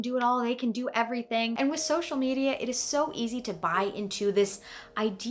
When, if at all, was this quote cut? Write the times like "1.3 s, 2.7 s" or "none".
1.6 s